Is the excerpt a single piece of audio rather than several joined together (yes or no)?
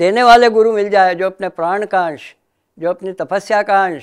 yes